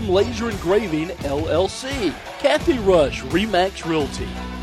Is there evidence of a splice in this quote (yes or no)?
yes